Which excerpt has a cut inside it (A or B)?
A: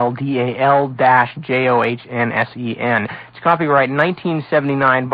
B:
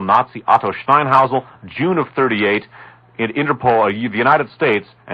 B